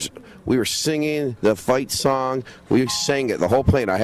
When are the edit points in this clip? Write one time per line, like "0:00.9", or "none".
0:02.5